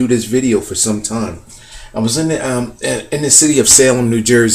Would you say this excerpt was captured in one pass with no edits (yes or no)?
no